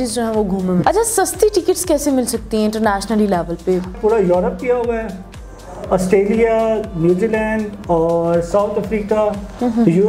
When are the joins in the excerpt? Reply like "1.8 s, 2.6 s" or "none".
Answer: 0.8 s, 3.9 s